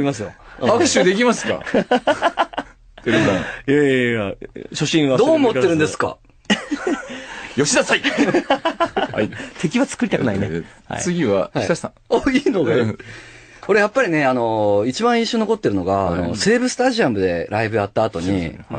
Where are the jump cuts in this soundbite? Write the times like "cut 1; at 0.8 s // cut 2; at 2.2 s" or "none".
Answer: cut 1; at 7.2 s